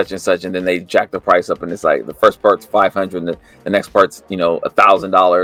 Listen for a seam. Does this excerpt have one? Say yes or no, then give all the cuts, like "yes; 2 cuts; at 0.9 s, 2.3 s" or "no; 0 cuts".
no; 0 cuts